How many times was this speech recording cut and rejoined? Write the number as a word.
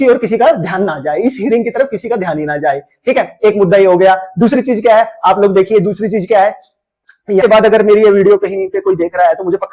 one